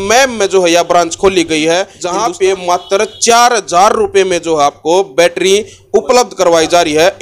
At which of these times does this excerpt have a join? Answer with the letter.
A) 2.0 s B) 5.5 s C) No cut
A